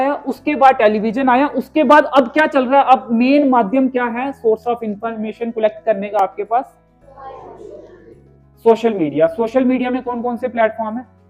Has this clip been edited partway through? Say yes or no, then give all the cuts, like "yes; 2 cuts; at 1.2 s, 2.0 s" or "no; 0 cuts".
no; 0 cuts